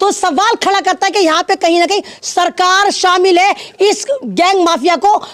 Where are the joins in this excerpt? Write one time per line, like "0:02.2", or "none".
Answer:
none

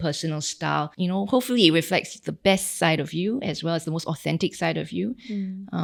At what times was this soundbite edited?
none

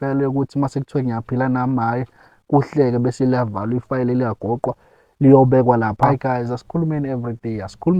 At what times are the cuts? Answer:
0:06.1

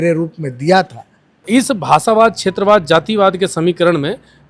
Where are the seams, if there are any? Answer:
0:01.5

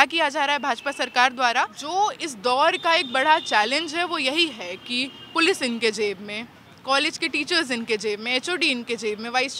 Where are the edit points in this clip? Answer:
0:01.8

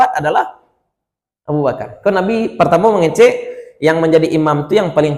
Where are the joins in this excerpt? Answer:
none

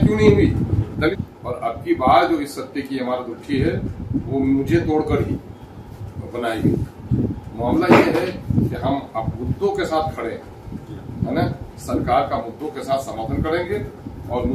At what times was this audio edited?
0:01.1

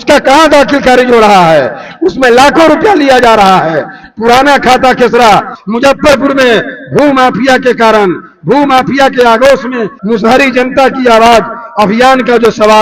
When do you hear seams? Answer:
0:05.5
0:09.9

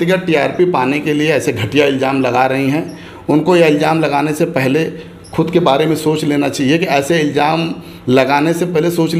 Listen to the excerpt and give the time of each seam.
none

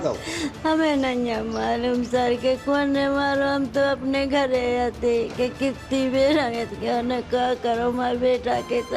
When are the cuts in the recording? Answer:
none

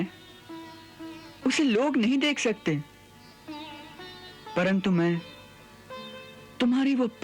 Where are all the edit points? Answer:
none

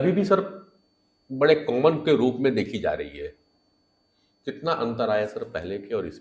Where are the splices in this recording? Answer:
none

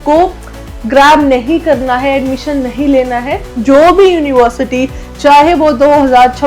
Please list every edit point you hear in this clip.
0:03.5

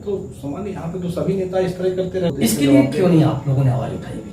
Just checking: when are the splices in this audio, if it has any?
0:02.3

